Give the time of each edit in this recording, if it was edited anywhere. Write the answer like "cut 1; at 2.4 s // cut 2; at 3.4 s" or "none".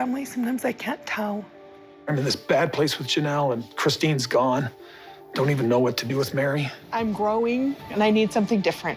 none

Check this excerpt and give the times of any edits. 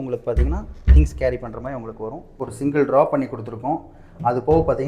cut 1; at 2.4 s

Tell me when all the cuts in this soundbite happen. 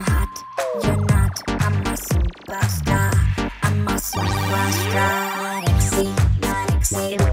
none

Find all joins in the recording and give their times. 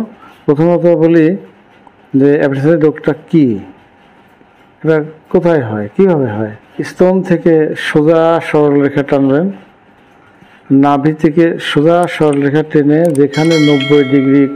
cut 1; at 6.8 s

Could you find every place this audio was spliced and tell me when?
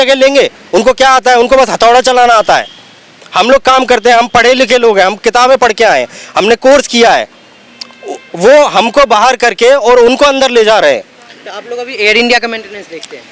none

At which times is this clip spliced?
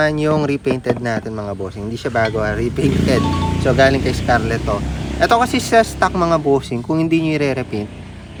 none

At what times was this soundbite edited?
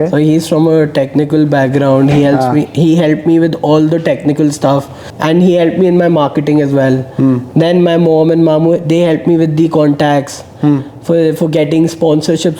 cut 1; at 5.0 s

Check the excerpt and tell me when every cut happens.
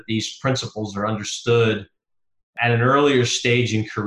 none

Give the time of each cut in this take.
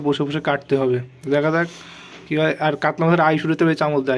cut 1; at 2.7 s

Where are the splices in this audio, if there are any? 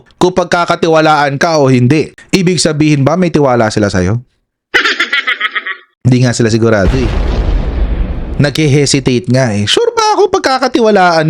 none

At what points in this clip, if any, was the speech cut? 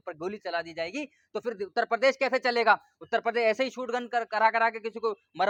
none

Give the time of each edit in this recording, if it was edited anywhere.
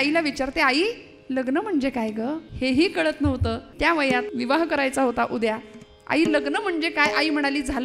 cut 1; at 2.5 s // cut 2; at 4.0 s

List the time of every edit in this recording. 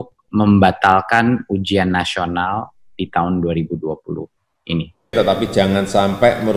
cut 1; at 5.1 s

